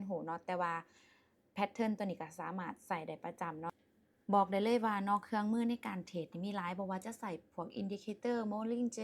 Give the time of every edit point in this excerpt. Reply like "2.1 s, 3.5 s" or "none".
3.8 s